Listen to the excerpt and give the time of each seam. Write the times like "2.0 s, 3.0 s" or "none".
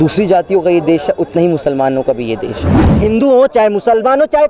2.9 s